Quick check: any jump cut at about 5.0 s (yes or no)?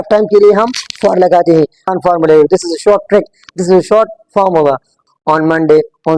yes